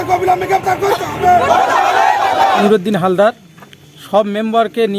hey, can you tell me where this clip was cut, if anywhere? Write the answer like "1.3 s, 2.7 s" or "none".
2.6 s